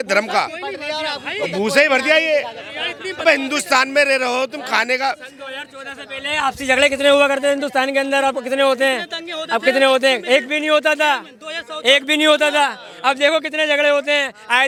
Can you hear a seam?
no; 0 cuts

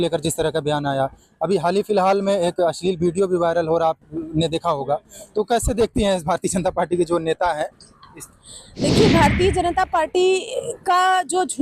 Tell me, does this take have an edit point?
no; 0 cuts

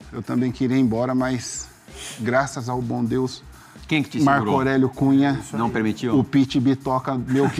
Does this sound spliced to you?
no; 0 cuts

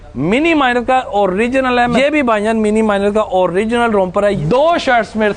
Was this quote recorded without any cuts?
no; 2 cuts; at 1.9 s, 4.4 s

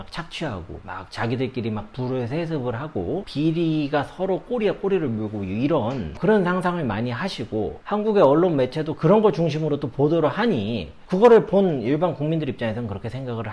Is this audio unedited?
yes; 0 cuts

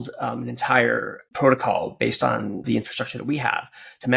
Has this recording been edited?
yes; 2 cuts; at 1.2 s, 2.6 s

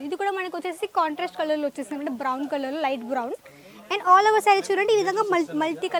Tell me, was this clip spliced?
no; 0 cuts

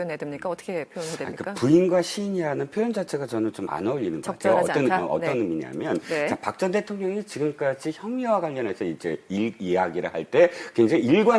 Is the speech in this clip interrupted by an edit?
yes; 1 cut; at 2.1 s

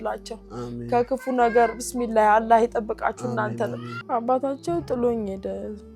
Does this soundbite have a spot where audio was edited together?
yes; 1 cut; at 3.9 s

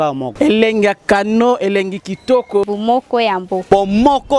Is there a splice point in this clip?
no; 0 cuts

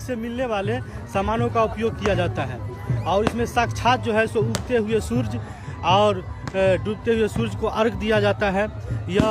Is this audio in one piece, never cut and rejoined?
yes; 0 cuts

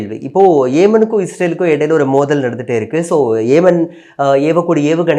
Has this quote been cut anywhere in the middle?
no; 0 cuts

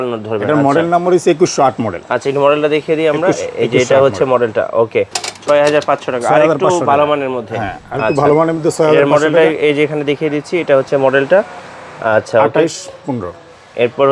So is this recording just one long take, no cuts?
no; 1 cut; at 5.2 s

